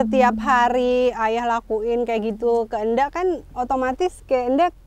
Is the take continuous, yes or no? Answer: yes